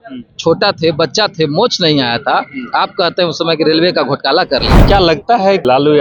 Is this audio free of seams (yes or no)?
no